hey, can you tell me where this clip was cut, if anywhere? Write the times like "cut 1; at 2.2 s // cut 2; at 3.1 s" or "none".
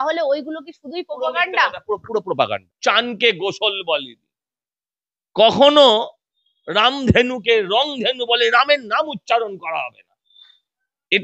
cut 1; at 2.7 s